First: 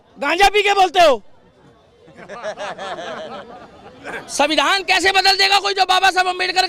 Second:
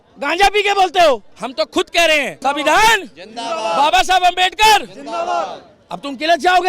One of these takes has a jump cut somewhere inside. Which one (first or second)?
second